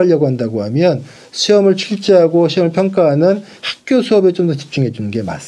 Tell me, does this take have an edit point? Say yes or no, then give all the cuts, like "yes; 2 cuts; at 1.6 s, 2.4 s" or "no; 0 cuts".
no; 0 cuts